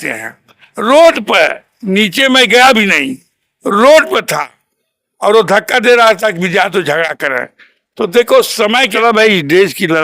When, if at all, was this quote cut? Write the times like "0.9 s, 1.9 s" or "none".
8.9 s